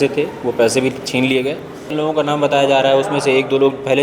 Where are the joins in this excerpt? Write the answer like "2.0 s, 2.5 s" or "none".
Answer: 1.9 s